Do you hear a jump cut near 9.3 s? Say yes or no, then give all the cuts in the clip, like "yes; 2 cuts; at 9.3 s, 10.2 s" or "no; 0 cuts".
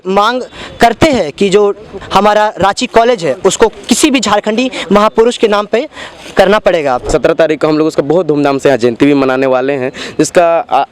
no; 1 cut; at 7.1 s